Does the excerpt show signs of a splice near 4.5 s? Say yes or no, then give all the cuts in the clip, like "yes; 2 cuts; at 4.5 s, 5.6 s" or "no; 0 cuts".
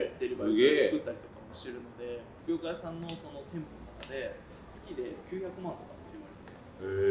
no; 1 cut; at 2.3 s